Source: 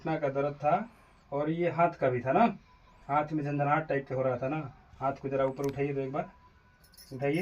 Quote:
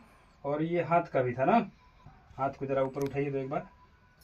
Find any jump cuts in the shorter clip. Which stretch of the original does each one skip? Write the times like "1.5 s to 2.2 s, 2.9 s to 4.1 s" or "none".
3.0 s to 4.7 s